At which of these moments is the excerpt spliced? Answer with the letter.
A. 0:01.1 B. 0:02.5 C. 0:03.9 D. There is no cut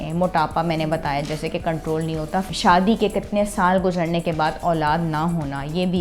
B